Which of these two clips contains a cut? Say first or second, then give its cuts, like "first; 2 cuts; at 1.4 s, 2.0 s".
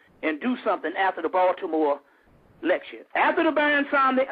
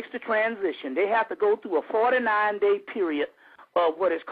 first; 1 cut; at 1.6 s